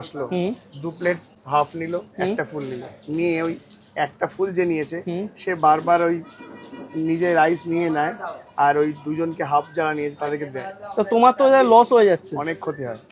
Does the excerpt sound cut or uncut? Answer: cut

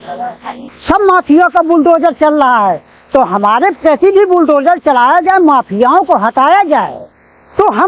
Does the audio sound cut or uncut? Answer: uncut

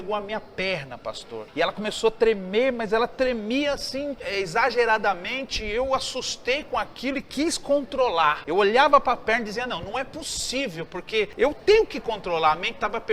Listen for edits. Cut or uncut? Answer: cut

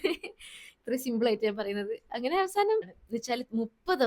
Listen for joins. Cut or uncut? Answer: cut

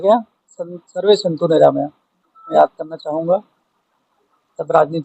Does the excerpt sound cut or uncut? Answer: cut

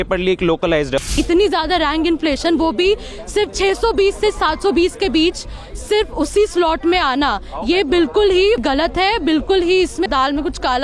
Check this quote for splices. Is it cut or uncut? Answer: cut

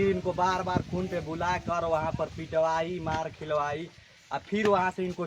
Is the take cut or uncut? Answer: uncut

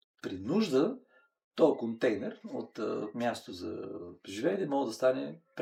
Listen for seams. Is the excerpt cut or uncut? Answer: uncut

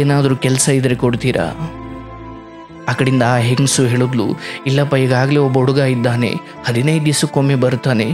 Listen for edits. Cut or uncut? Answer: uncut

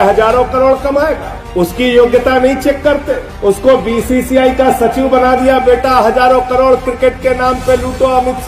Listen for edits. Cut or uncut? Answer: uncut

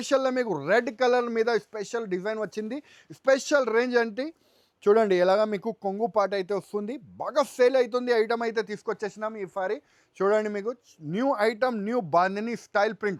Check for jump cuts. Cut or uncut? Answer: uncut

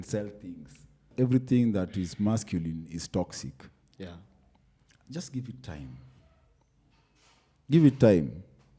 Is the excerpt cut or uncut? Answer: cut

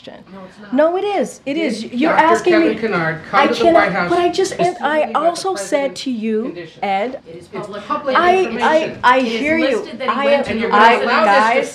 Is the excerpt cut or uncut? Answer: cut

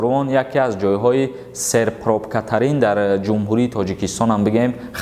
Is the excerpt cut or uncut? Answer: uncut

